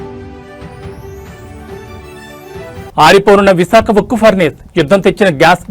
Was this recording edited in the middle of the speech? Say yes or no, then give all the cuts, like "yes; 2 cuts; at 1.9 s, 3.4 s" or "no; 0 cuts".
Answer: yes; 1 cut; at 1.1 s